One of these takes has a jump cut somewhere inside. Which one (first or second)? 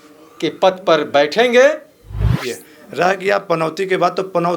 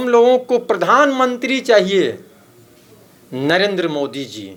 first